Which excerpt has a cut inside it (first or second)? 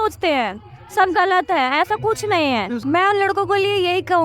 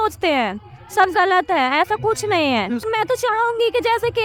first